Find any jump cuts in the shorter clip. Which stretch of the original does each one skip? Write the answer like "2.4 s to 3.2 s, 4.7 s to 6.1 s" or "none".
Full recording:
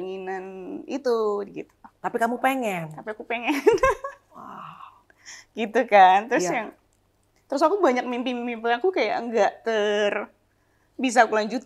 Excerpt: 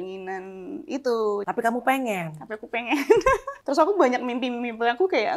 1.5 s to 2.0 s, 4.1 s to 7.4 s